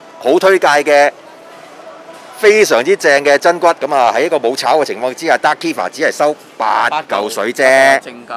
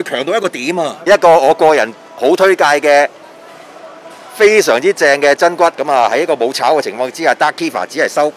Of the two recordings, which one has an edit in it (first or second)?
second